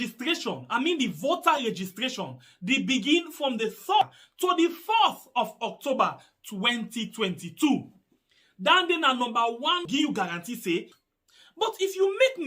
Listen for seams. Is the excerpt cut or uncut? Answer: cut